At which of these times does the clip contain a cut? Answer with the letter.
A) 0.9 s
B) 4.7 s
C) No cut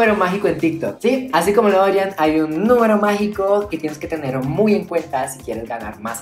A